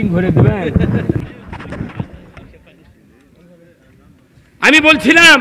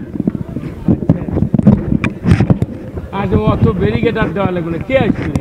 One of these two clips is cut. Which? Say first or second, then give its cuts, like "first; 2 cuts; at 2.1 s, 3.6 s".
first; 1 cut; at 1.2 s